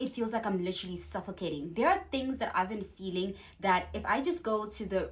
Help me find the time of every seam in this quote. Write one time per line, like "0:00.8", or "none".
none